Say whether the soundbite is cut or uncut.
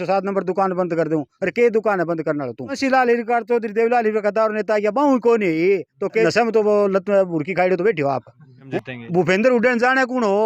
cut